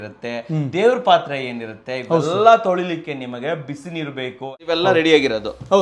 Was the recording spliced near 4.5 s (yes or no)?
yes